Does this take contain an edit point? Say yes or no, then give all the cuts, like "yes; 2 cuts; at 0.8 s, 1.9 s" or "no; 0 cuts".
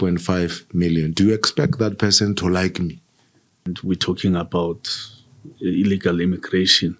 yes; 1 cut; at 3.7 s